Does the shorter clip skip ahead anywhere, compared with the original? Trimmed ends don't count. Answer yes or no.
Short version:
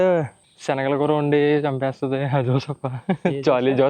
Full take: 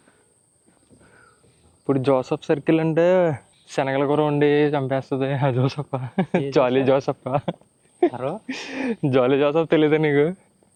no